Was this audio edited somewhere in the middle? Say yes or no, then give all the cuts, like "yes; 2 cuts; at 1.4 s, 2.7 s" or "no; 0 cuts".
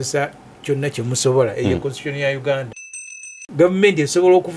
yes; 1 cut; at 2.8 s